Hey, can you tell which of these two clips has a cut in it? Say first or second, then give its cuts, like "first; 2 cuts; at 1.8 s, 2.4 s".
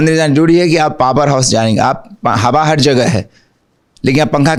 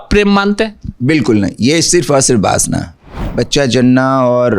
second; 1 cut; at 3.2 s